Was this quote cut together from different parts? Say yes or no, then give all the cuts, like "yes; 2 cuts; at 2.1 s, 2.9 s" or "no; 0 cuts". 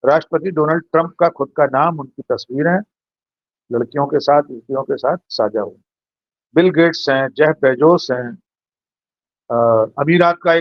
no; 0 cuts